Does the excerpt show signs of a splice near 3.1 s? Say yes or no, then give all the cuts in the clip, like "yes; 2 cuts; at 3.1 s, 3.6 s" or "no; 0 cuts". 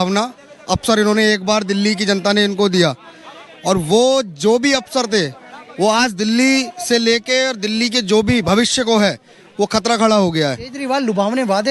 no; 1 cut; at 10.8 s